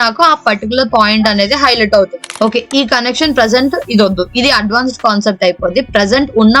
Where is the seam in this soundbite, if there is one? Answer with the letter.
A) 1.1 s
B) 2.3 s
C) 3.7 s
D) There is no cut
B